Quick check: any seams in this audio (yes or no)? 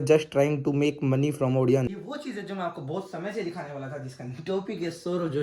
yes